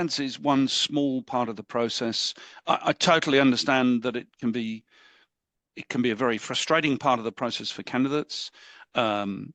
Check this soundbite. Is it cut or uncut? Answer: uncut